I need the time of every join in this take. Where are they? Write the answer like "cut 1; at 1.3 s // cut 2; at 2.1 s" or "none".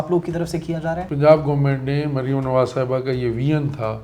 cut 1; at 1.1 s